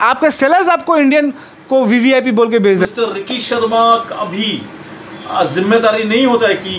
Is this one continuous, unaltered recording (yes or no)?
no